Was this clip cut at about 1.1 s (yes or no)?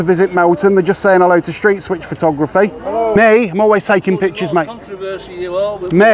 no